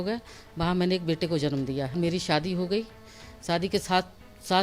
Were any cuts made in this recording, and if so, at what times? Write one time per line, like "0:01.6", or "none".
0:01.9